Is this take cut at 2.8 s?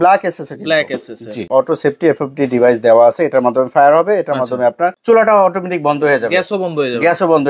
no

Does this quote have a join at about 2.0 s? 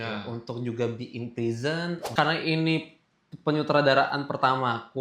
yes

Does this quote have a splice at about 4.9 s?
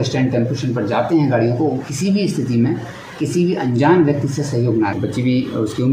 yes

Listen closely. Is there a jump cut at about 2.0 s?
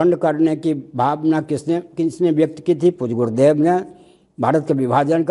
no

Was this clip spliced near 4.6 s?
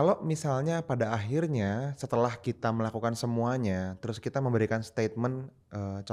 no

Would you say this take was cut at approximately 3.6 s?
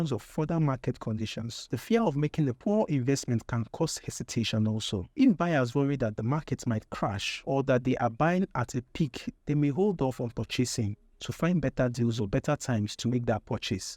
no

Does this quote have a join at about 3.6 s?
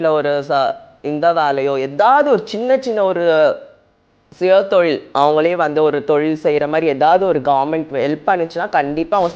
no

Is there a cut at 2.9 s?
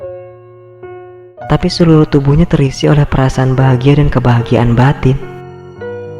no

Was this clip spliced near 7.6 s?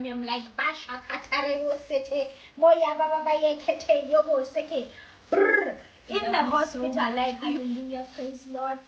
yes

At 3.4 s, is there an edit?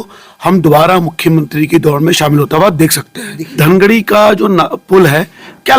yes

